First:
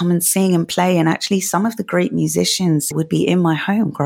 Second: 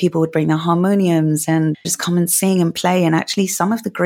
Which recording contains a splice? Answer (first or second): first